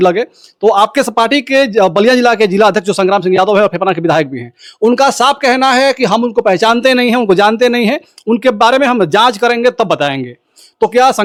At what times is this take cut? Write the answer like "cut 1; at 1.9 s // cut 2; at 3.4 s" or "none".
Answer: none